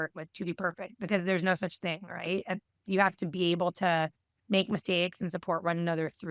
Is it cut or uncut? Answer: uncut